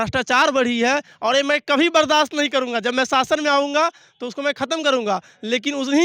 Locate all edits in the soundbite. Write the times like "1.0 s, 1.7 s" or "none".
none